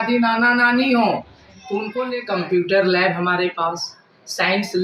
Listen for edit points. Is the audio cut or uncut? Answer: cut